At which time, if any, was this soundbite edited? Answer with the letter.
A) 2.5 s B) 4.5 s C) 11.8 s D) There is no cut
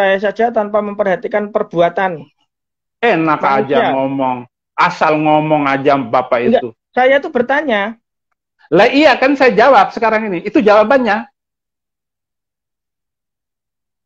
D